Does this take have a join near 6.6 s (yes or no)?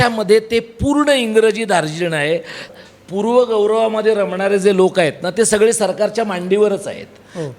no